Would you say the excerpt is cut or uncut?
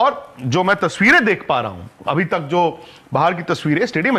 uncut